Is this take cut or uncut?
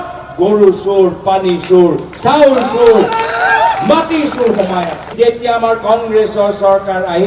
cut